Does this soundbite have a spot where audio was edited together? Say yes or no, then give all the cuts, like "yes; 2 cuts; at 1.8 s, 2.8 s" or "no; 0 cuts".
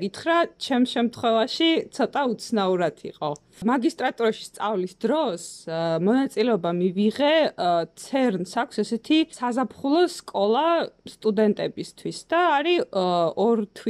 yes; 2 cuts; at 3.6 s, 9.3 s